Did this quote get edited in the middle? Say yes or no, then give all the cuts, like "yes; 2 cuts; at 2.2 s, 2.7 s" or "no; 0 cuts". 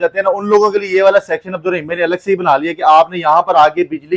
no; 0 cuts